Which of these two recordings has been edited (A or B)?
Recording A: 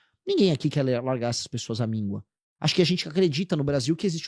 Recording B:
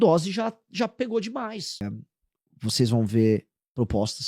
B